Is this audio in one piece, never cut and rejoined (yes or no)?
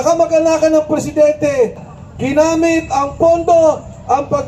no